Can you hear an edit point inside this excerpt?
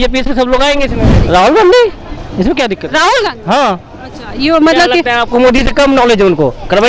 yes; 1 cut; at 1.2 s

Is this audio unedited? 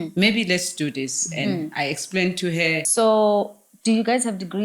no; 1 cut; at 2.9 s

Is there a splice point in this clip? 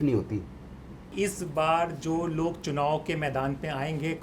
yes; 1 cut; at 1.0 s

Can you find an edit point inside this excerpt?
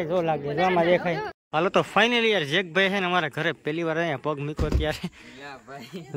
yes; 1 cut; at 1.3 s

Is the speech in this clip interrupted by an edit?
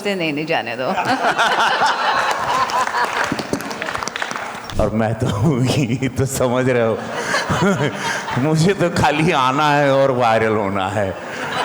yes; 1 cut; at 4.6 s

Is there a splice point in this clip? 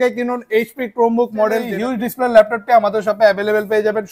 yes; 1 cut; at 1.7 s

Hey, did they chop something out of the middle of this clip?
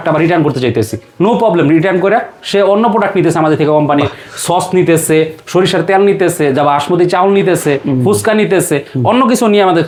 no; 0 cuts

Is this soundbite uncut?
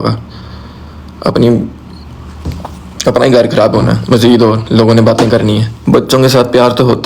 no; 1 cut; at 5.7 s

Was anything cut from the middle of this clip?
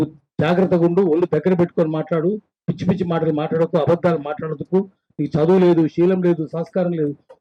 no; 0 cuts

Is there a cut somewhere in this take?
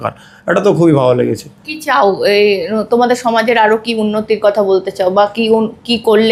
no; 0 cuts

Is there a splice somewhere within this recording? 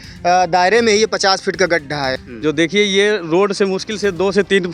yes; 1 cut; at 2.2 s

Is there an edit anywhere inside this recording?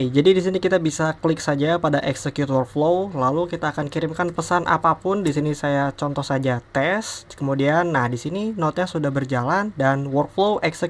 no; 0 cuts

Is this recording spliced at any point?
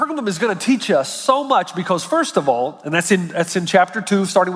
no; 0 cuts

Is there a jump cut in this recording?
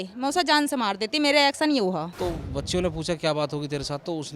yes; 1 cut; at 2.1 s

